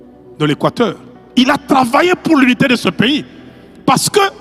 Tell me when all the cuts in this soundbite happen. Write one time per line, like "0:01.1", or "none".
none